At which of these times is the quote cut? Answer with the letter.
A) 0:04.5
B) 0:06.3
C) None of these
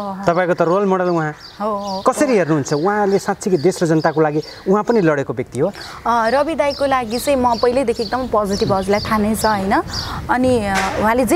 C